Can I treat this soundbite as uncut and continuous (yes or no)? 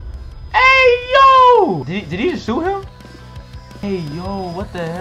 no